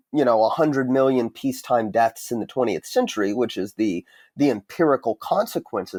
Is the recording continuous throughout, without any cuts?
yes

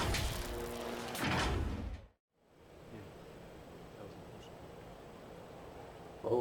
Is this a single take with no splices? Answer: no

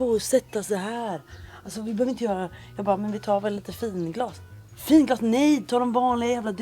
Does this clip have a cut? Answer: no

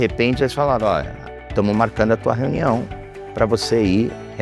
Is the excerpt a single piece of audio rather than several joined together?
yes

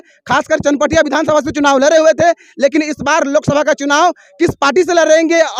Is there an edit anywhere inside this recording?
no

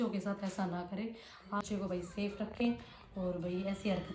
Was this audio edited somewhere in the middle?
yes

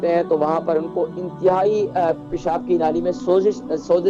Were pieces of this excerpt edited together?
no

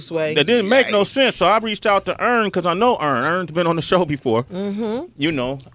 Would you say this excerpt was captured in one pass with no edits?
no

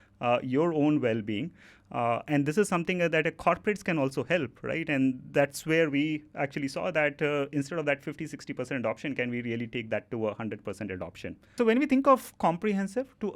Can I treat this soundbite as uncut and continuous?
no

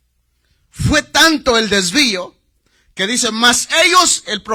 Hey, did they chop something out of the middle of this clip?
no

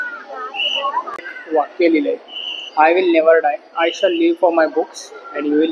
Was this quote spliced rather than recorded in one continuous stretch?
yes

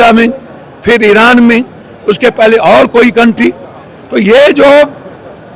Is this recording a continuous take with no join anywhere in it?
yes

